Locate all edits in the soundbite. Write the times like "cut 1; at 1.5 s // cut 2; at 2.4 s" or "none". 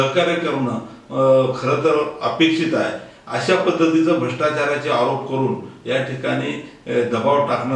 none